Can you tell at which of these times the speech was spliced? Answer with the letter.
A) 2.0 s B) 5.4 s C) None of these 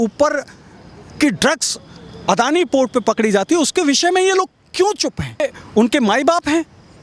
B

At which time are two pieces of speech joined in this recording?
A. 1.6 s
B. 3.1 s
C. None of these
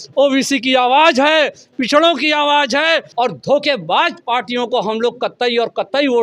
B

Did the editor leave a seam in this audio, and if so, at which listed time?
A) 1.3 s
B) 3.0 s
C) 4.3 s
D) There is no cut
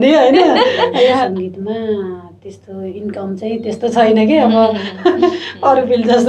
A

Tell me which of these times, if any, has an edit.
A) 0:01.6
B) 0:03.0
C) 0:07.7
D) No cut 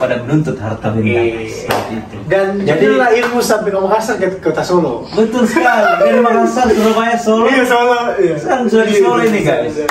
D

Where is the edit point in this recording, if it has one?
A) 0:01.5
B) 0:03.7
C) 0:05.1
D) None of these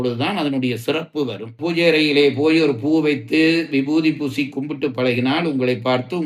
A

